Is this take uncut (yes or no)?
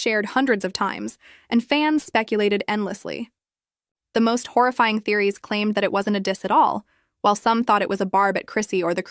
yes